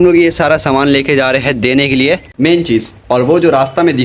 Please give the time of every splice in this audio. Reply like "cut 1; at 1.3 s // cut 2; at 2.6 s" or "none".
cut 1; at 2.3 s